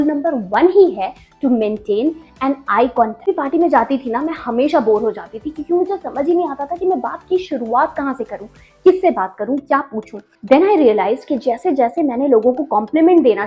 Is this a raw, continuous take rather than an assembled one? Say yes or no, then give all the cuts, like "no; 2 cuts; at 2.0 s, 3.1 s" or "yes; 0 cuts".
no; 1 cut; at 3.3 s